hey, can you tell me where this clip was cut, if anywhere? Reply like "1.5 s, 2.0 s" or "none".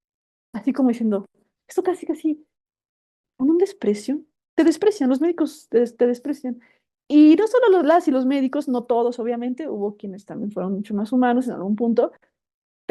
none